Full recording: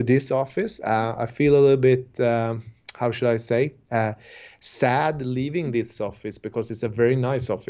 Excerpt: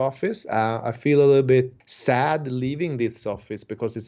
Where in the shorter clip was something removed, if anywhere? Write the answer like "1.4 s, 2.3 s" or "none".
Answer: 1.7 s